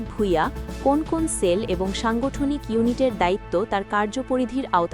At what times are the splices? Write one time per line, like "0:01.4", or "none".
none